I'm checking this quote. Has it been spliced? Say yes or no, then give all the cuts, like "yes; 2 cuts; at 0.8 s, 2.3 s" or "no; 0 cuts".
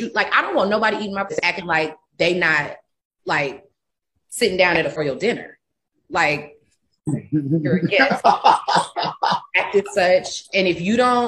yes; 2 cuts; at 1.3 s, 5.0 s